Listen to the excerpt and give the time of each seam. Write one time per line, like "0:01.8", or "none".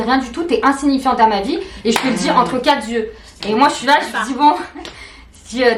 none